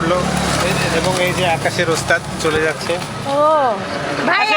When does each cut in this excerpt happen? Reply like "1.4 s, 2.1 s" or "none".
none